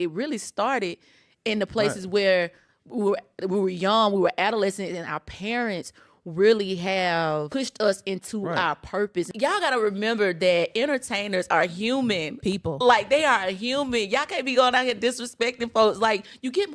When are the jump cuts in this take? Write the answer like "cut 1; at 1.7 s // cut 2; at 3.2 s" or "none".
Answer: cut 1; at 7.5 s // cut 2; at 9.3 s